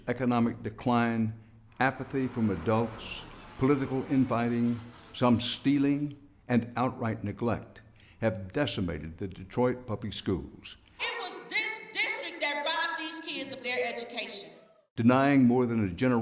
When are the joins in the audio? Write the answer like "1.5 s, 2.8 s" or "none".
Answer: 15.2 s